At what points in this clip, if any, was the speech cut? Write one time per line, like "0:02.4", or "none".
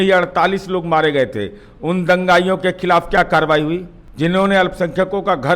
0:04.0